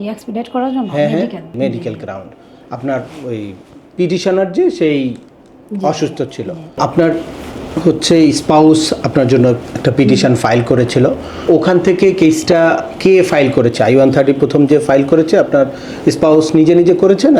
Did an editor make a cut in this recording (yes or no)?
yes